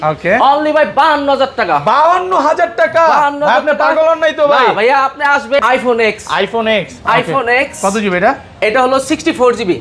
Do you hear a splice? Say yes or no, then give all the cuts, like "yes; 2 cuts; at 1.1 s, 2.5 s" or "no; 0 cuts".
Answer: yes; 1 cut; at 5.6 s